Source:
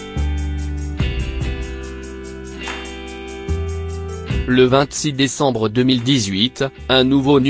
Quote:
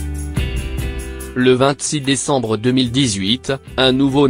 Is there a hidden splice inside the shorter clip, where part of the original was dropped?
yes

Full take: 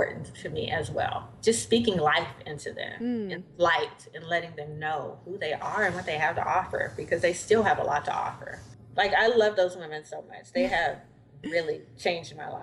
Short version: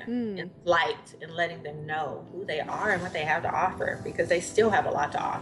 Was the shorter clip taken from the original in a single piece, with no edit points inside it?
yes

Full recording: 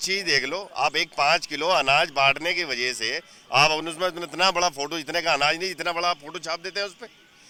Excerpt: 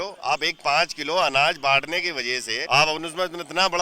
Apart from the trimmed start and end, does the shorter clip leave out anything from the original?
yes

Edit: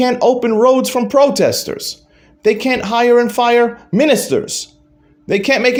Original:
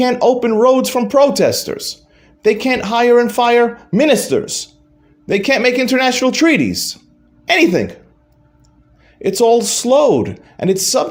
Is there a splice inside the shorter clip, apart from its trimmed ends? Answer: no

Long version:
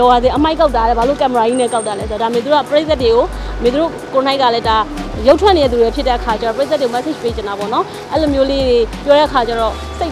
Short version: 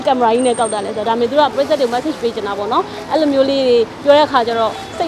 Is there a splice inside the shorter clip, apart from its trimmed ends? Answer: yes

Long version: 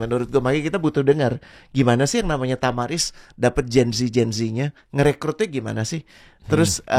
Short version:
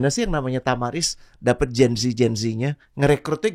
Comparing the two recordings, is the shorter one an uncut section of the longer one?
yes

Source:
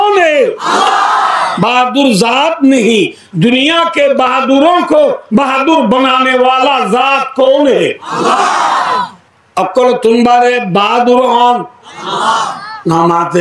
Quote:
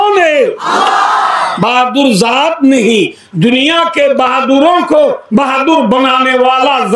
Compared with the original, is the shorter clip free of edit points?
yes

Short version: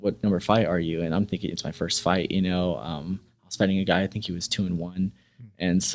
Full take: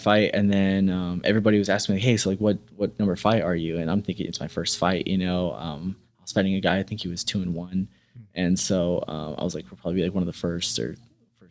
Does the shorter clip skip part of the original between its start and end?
no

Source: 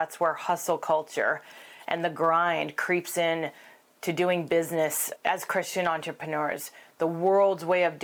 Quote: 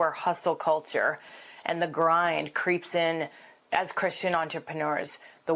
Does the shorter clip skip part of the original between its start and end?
yes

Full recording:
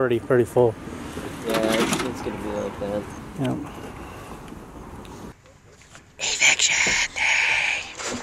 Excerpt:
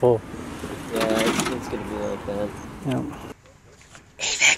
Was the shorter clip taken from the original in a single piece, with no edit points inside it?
no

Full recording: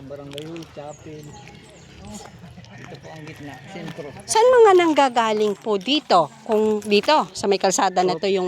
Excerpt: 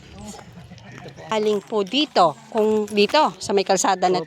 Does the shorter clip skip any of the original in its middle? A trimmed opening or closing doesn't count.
yes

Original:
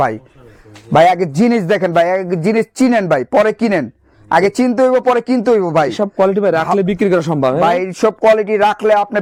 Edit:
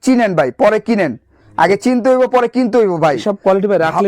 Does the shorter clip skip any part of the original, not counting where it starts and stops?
no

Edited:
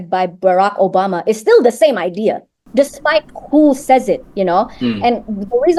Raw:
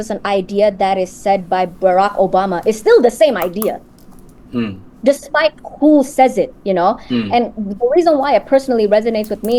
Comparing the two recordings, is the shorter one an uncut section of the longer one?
no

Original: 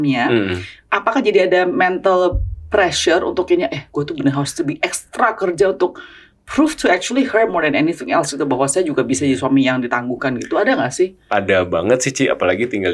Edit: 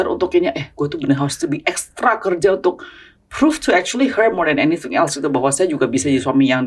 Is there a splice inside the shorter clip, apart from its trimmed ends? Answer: no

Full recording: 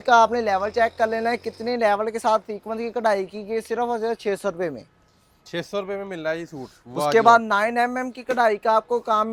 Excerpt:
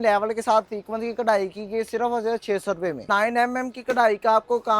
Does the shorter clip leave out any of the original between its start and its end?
yes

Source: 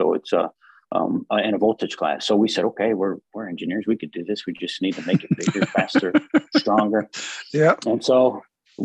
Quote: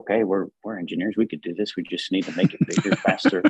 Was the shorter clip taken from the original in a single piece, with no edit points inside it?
yes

